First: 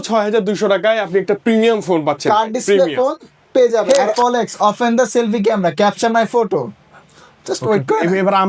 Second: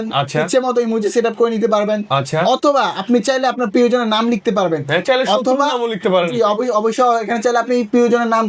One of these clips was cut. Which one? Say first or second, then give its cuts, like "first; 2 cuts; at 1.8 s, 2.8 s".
first; 1 cut; at 3.9 s